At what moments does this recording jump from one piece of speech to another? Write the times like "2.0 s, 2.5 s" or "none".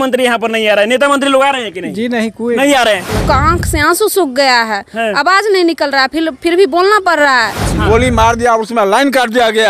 3.2 s, 7.6 s

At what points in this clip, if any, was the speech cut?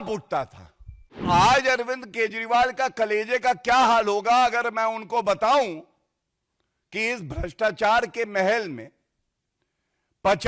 1.2 s

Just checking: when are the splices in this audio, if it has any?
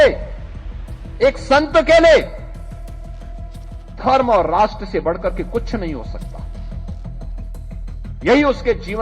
2.4 s, 4.0 s

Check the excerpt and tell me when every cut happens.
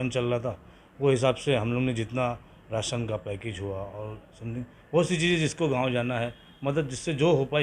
none

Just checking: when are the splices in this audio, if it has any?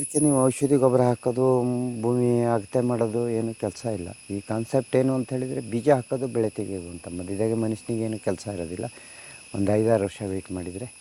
none

